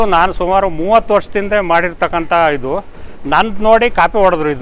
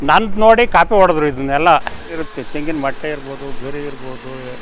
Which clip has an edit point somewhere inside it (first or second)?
second